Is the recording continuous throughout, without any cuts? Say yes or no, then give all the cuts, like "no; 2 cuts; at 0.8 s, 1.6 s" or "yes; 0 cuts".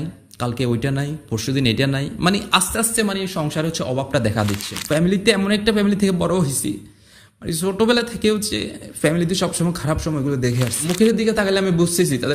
no; 2 cuts; at 4.7 s, 10.8 s